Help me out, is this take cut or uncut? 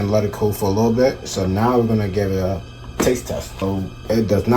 cut